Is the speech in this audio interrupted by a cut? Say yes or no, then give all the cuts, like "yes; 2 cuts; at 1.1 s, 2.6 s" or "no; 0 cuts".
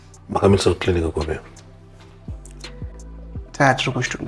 no; 0 cuts